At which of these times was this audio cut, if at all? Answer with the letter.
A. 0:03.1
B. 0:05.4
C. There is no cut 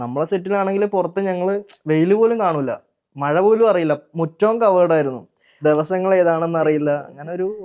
B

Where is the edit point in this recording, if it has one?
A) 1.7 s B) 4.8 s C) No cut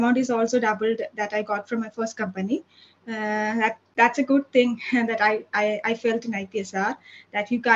C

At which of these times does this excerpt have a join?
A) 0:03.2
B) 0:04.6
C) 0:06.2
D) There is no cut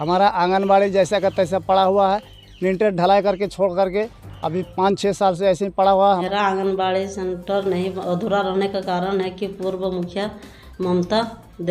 C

